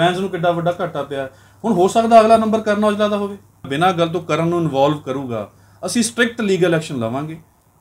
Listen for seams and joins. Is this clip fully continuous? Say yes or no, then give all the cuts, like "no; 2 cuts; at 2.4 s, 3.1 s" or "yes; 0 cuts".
no; 1 cut; at 3.7 s